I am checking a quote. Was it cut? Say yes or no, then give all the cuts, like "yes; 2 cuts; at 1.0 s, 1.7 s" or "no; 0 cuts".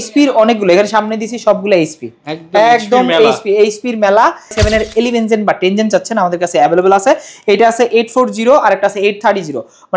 yes; 1 cut; at 4.6 s